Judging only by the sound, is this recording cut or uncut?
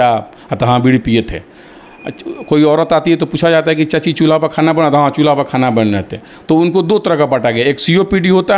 uncut